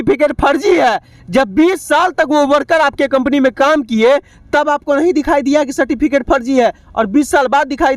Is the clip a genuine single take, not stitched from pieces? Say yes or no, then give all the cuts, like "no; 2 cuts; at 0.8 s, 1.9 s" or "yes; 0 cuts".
yes; 0 cuts